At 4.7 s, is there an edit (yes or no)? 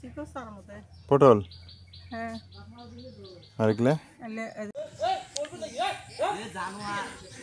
yes